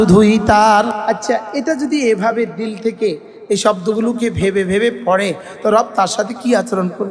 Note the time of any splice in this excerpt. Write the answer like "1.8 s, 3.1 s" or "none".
1.0 s